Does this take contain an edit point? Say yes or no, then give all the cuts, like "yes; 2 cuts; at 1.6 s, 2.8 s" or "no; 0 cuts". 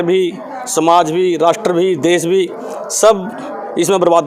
no; 0 cuts